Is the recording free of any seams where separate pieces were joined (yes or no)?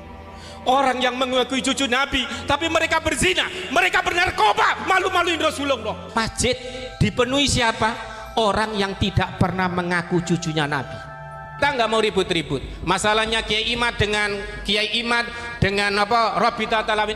no